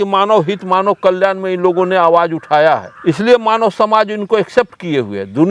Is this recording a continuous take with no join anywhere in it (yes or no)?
yes